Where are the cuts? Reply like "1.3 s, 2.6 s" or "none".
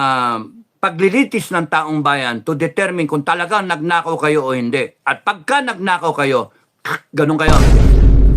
7.5 s